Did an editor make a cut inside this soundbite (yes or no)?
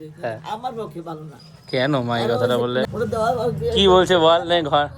yes